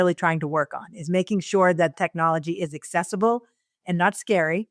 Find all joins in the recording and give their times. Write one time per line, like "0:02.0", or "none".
0:01.9